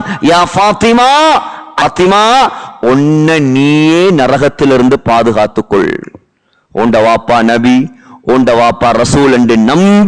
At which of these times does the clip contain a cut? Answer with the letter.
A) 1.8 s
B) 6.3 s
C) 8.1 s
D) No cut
A